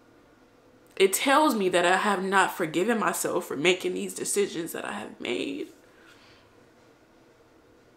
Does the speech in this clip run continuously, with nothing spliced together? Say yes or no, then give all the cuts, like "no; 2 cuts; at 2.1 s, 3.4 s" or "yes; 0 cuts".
yes; 0 cuts